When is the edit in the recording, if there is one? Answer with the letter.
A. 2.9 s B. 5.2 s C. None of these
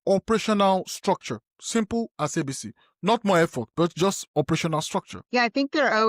B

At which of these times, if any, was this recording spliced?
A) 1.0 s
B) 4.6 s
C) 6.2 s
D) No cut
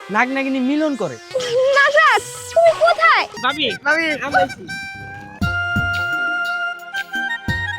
A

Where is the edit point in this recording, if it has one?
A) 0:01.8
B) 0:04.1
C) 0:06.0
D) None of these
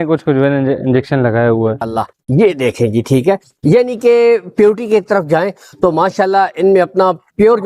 A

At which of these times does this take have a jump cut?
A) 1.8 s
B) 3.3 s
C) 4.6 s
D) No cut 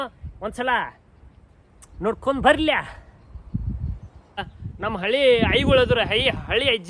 C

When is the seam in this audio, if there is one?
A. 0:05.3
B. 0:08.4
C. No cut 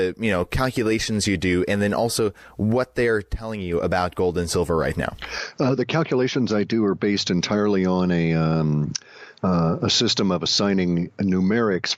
A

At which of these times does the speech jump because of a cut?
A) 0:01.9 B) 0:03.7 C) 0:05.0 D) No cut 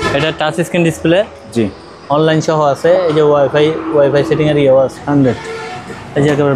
C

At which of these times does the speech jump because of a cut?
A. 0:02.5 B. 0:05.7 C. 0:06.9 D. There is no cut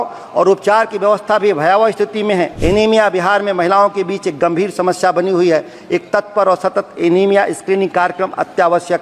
A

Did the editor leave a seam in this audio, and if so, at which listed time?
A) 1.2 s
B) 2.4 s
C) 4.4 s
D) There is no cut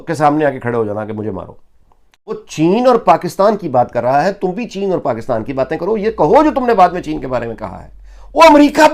B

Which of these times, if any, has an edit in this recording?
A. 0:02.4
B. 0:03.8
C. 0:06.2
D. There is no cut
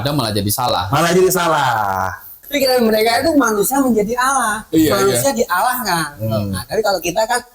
A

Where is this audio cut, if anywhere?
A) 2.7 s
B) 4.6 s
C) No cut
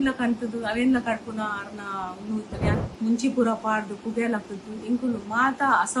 A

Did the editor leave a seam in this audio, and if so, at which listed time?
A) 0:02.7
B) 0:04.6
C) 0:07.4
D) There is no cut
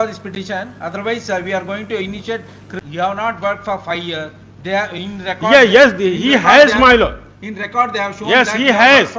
A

